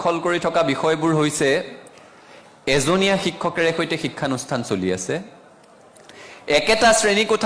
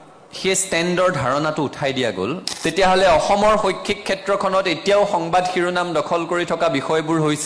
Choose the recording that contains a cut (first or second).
second